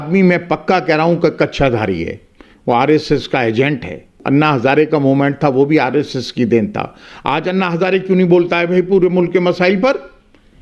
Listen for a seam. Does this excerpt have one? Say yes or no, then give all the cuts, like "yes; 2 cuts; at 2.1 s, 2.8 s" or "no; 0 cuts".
yes; 1 cut; at 4.2 s